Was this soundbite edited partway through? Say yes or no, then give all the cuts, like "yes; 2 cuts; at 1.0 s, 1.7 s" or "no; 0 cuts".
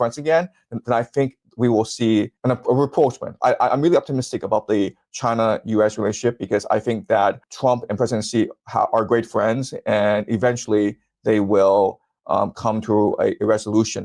no; 0 cuts